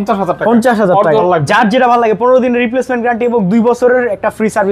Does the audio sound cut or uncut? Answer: cut